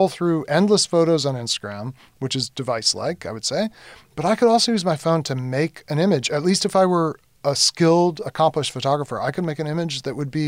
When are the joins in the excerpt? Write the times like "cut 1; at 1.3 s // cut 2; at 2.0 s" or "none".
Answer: none